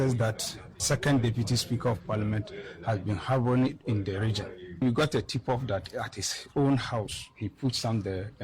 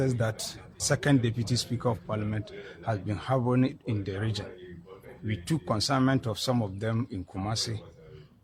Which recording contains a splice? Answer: first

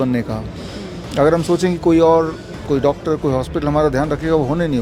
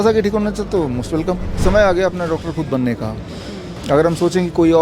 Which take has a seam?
second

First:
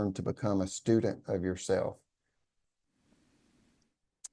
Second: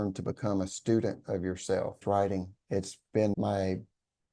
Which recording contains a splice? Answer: second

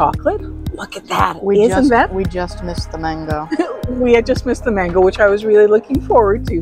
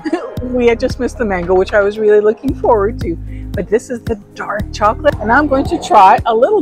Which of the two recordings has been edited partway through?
second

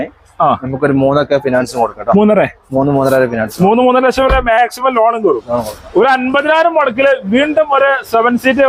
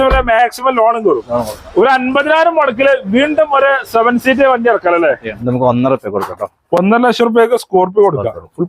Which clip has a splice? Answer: second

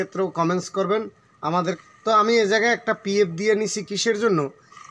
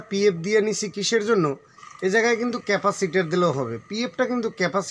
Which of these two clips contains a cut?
first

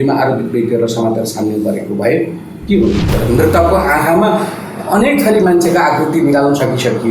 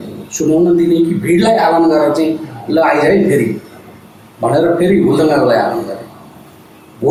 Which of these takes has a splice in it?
first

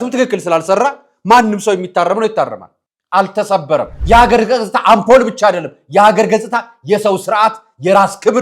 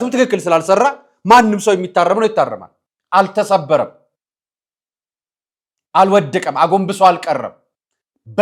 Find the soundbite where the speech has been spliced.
first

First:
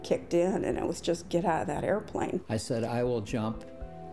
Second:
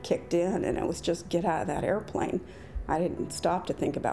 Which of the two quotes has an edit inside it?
first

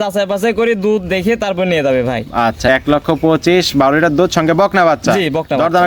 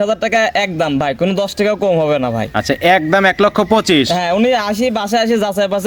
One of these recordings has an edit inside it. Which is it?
first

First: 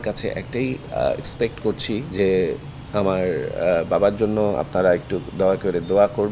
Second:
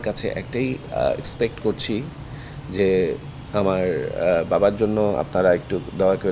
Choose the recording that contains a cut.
first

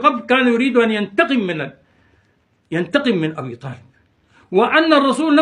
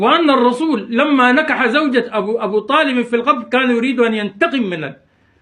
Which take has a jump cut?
first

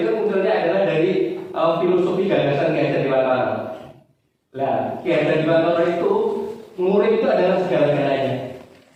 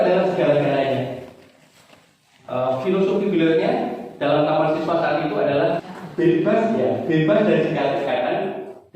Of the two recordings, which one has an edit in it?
second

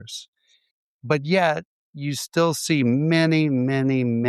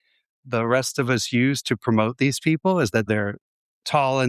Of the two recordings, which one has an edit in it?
second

